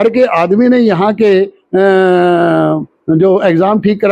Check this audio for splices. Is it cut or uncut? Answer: uncut